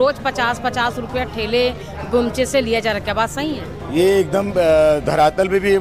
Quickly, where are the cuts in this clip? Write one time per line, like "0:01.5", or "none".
none